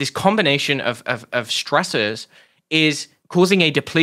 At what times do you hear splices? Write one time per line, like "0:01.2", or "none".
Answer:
0:03.1